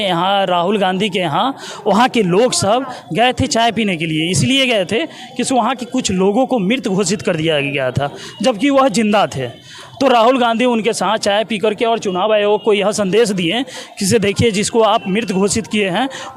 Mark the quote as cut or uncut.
uncut